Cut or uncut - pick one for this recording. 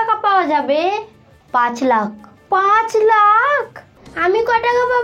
cut